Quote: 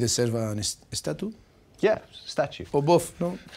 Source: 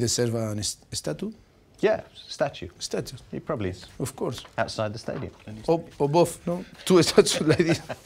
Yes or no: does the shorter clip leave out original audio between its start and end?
yes